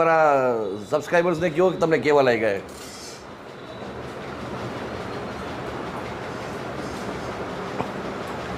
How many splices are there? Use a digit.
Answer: 0